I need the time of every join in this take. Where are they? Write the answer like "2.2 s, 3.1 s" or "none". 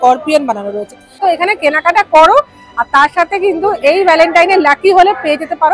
1.1 s